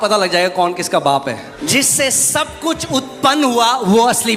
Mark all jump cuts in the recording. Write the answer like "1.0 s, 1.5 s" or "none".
1.6 s

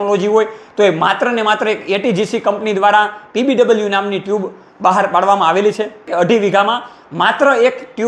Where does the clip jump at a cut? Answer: 6.0 s

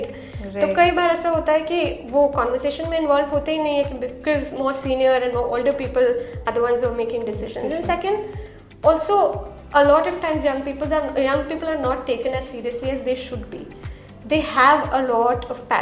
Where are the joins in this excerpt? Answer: none

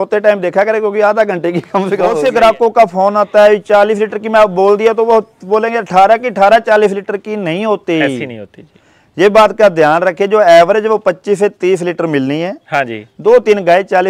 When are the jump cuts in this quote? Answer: 2.2 s

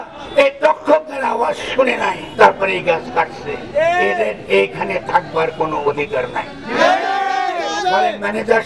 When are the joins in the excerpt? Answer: 2.2 s

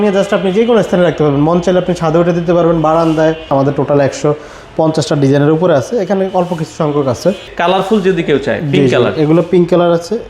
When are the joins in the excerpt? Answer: 3.5 s, 7.5 s

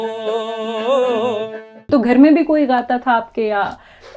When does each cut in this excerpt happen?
1.9 s

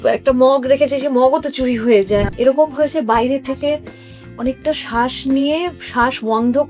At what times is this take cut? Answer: 2.3 s

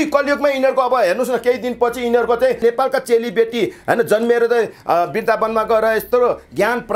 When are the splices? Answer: 2.6 s

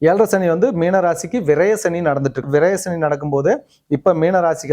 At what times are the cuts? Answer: 2.4 s

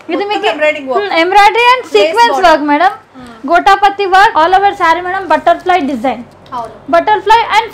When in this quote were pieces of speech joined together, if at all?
4.3 s

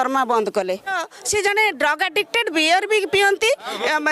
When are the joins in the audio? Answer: 0.9 s

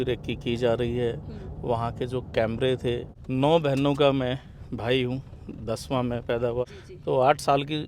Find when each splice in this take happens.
3.1 s, 6.7 s

